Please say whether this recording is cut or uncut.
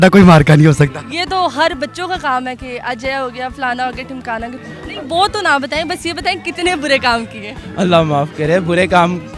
uncut